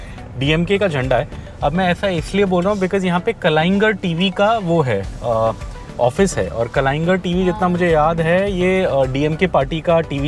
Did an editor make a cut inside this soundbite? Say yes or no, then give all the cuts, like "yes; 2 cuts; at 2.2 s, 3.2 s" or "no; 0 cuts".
no; 0 cuts